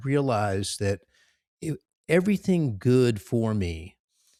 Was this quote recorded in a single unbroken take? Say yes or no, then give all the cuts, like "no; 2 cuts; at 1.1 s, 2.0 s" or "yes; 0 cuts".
yes; 0 cuts